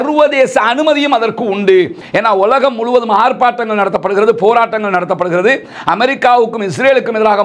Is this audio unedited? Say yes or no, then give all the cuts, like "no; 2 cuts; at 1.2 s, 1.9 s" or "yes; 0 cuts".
no; 1 cut; at 2.0 s